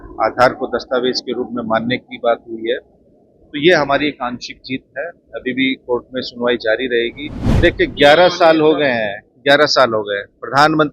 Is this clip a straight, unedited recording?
no; 1 cut; at 7.4 s

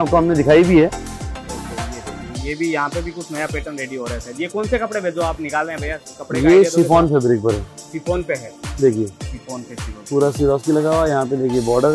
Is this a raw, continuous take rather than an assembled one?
yes; 0 cuts

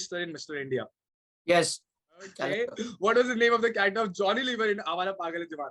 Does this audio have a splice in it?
yes; 1 cut; at 2.5 s

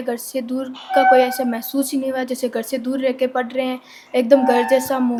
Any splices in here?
no; 0 cuts

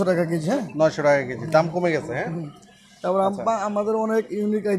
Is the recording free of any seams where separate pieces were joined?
yes; 0 cuts

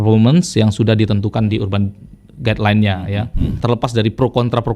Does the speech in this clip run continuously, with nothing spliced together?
no; 1 cut; at 3.6 s

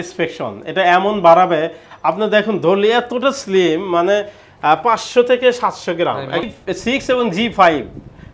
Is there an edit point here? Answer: yes; 1 cut; at 6.4 s

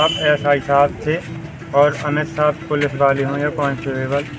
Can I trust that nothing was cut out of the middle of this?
yes; 0 cuts

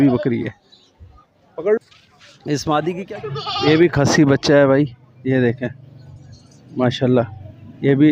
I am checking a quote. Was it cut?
yes; 1 cut; at 3.0 s

